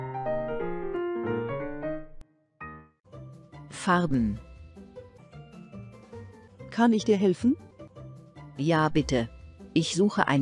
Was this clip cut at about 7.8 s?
no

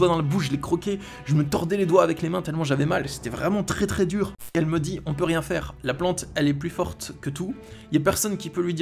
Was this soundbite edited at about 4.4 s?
yes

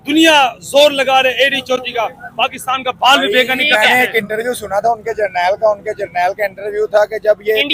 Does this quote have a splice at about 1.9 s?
no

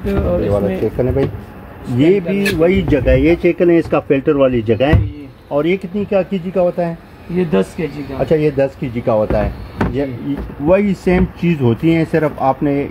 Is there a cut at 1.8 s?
no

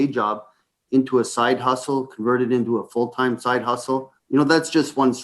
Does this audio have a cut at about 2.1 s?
no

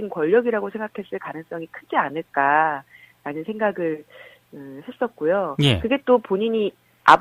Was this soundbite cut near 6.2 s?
yes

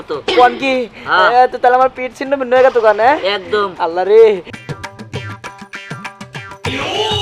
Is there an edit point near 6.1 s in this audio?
no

